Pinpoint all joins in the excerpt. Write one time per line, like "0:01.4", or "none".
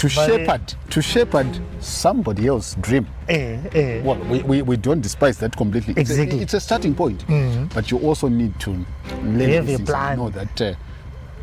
none